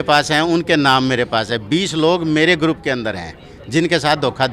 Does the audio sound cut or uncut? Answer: uncut